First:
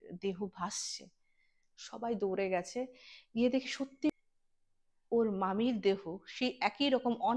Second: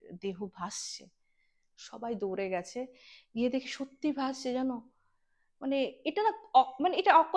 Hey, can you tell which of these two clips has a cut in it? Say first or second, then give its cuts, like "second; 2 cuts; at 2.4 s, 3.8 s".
first; 1 cut; at 4.1 s